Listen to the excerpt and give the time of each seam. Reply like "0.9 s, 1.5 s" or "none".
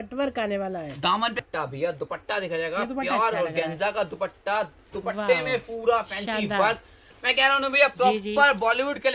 1.4 s